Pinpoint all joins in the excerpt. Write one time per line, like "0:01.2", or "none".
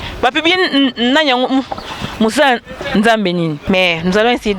0:03.6